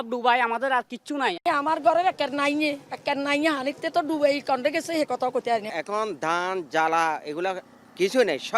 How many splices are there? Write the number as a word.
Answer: two